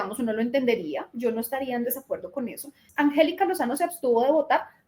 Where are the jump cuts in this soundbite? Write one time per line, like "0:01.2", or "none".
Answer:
0:02.8